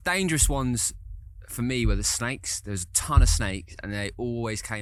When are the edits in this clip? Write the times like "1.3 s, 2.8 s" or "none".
none